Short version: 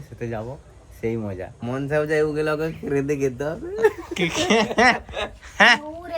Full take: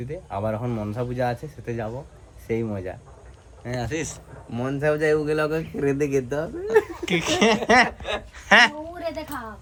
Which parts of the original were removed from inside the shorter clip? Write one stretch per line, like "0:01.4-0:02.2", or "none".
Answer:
0:03.0-0:04.5